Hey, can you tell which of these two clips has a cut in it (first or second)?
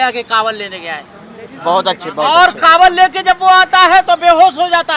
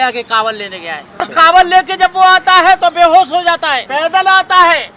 second